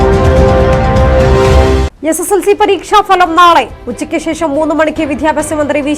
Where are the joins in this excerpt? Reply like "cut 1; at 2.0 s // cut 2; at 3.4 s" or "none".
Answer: none